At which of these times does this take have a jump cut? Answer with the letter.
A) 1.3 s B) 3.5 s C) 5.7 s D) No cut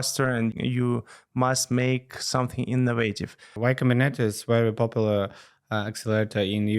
B